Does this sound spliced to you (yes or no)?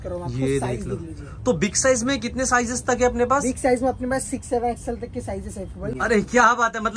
yes